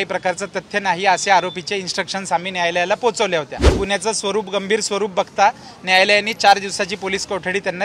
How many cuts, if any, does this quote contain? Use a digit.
1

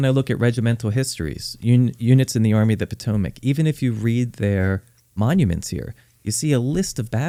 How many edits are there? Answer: 0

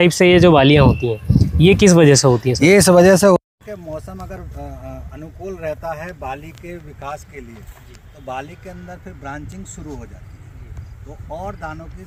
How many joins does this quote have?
0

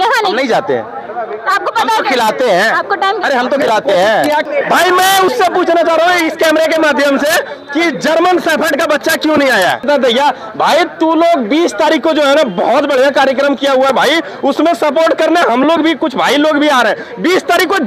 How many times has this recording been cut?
2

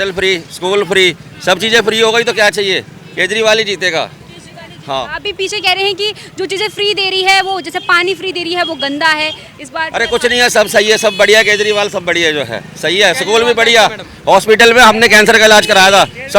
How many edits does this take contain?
0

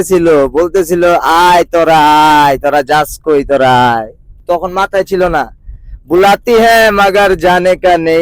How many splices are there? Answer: 1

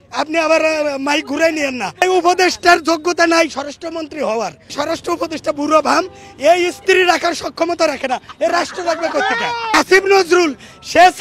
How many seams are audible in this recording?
3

